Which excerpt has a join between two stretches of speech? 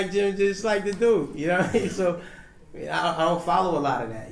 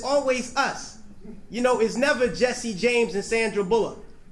second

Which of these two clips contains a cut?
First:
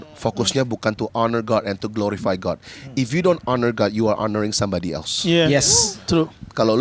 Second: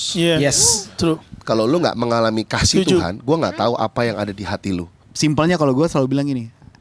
second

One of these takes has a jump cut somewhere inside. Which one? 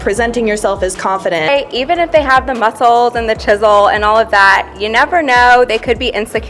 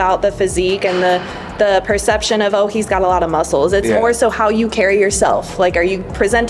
first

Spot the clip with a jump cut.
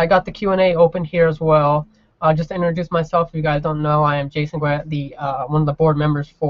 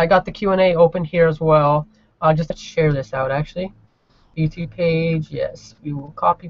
first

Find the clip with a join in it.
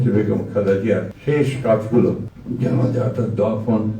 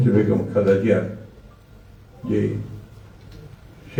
first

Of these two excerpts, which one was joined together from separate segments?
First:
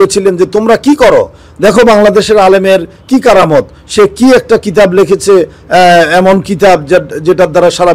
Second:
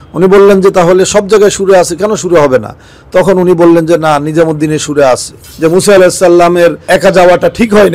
second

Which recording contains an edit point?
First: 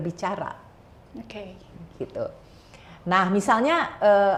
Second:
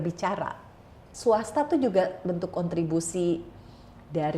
second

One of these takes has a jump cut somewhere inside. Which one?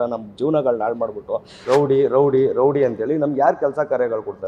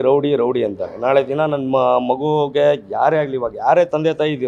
first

